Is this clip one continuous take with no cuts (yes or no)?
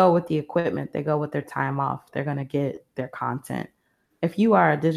yes